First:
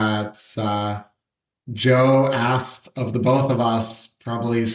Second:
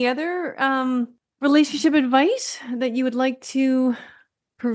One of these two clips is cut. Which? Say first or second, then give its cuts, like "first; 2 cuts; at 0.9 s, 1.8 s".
second; 1 cut; at 1.2 s